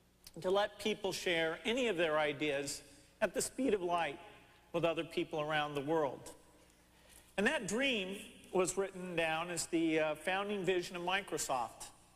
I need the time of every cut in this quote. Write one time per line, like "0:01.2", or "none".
0:02.8